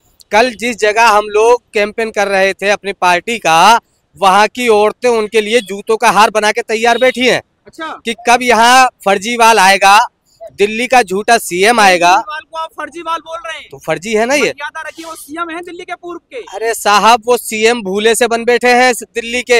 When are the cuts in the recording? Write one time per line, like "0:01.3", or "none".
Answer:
none